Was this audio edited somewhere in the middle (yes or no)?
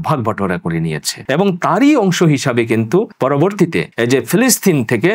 yes